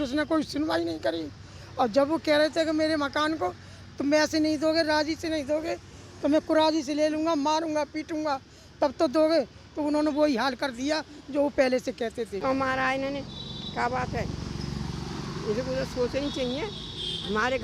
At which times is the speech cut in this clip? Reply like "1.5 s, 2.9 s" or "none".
12.4 s